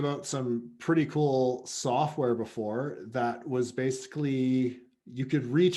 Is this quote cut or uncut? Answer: uncut